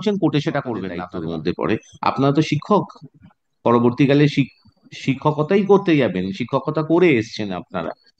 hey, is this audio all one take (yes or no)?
no